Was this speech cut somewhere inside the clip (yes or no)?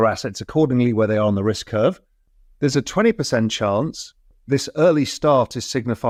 no